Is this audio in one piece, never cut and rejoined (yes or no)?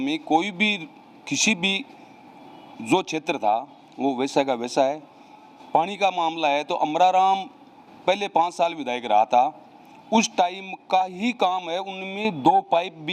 yes